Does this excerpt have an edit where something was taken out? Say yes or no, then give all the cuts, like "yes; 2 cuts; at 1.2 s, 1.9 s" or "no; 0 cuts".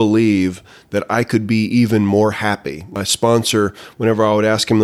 yes; 1 cut; at 2.9 s